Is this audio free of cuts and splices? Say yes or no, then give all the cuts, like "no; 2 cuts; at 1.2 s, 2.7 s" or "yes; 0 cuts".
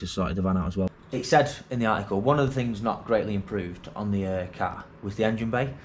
no; 1 cut; at 0.9 s